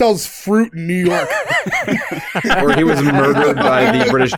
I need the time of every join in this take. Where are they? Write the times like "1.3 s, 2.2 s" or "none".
none